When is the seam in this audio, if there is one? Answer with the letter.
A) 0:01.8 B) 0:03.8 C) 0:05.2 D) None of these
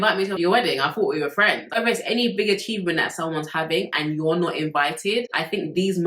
A